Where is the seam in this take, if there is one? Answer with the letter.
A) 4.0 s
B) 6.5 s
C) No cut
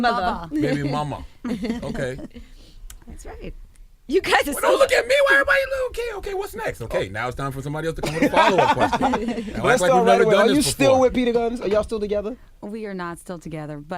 B